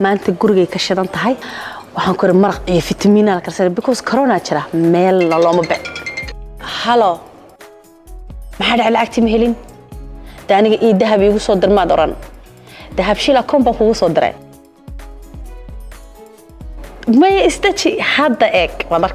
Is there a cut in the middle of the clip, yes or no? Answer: no